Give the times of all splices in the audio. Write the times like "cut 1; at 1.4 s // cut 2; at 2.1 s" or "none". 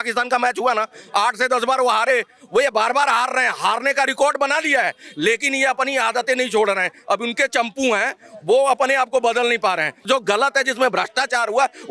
cut 1; at 10.1 s